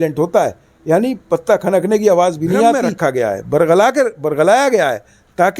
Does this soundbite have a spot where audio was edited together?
yes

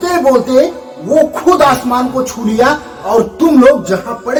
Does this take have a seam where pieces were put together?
no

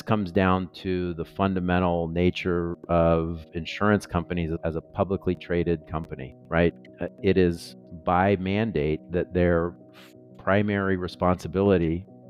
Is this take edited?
no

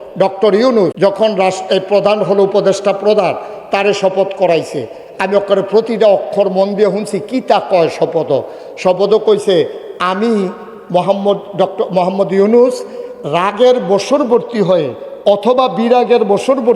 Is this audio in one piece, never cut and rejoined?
no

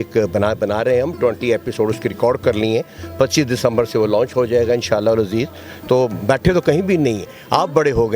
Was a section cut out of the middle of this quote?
no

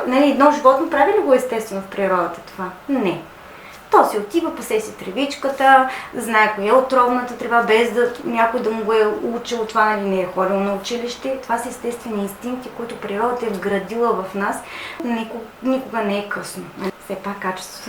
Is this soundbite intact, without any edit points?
no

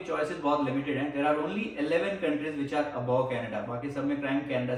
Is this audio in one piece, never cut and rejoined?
yes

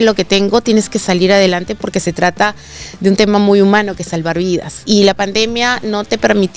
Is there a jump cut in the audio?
yes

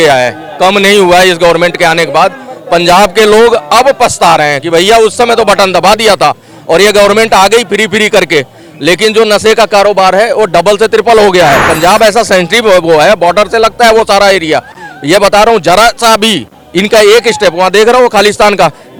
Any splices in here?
no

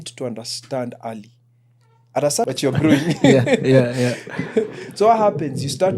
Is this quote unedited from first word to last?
no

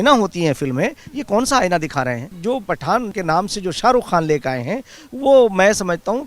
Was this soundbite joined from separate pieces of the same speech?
yes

